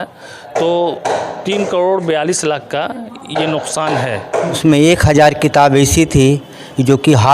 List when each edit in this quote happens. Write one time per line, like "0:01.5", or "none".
0:04.6